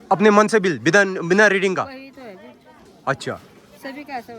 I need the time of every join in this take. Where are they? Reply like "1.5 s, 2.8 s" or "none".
none